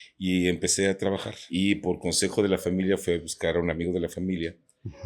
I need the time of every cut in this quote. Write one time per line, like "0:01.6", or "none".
0:01.4